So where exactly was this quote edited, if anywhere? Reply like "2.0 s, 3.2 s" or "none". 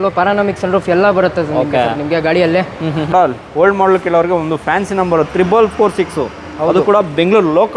3.1 s